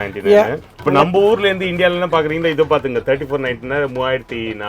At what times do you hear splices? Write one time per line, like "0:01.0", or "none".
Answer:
none